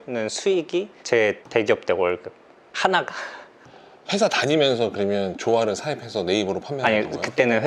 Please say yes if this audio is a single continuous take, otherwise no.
yes